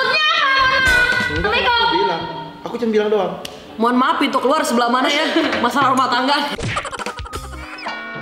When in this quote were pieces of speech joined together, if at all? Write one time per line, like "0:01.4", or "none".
none